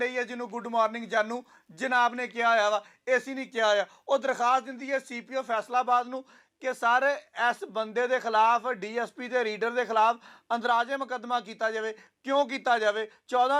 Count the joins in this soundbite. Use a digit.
0